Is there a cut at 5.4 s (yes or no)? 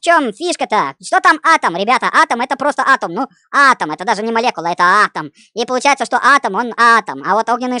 no